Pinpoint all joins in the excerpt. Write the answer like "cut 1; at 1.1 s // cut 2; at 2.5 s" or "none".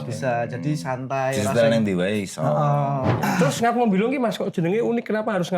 cut 1; at 3.2 s